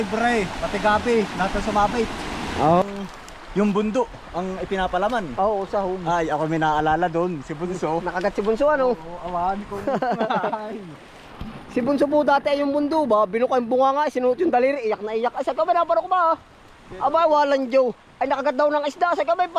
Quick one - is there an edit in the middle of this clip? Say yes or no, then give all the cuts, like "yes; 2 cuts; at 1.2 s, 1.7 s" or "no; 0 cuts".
yes; 1 cut; at 2.8 s